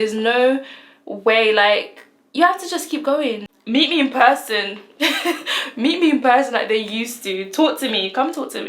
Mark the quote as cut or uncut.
cut